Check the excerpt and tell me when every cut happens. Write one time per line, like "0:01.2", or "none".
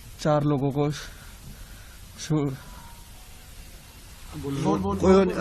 none